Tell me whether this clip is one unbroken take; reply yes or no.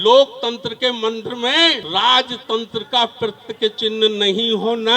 no